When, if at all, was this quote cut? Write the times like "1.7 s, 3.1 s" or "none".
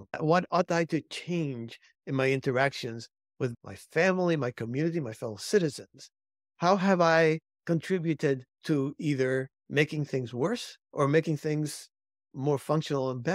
3.5 s, 7.5 s, 8.5 s, 9.6 s, 10.8 s